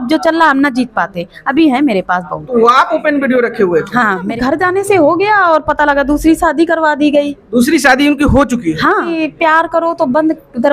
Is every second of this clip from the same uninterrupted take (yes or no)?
no